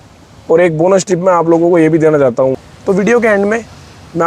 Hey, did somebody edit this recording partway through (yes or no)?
yes